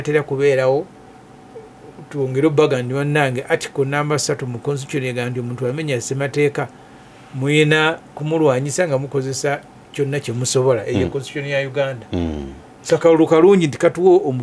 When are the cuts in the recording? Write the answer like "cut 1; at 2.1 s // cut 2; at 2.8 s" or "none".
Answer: none